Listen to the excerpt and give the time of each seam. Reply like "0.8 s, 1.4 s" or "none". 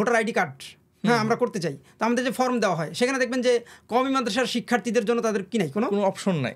none